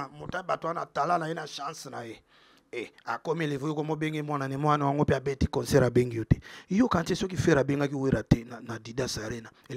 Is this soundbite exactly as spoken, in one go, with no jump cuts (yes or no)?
yes